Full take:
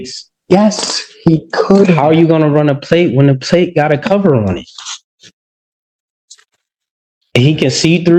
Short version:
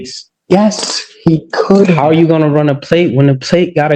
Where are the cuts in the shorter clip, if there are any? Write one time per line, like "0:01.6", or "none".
none